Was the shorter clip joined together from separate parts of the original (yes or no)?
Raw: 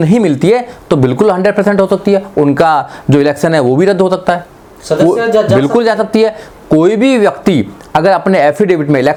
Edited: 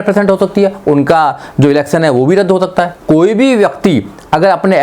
yes